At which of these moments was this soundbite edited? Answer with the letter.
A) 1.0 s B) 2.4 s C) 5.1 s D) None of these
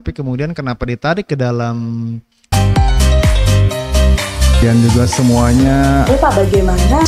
B